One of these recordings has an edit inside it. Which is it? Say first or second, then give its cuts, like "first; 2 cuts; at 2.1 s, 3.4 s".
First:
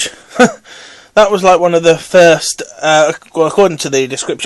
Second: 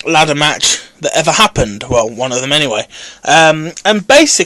first; 1 cut; at 2.5 s